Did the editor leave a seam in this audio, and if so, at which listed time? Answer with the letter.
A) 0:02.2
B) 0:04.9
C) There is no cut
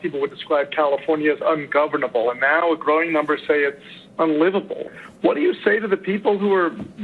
B